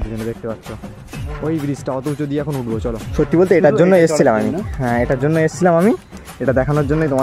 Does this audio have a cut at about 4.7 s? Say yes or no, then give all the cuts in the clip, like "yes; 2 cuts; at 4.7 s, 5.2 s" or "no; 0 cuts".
no; 1 cut; at 3.0 s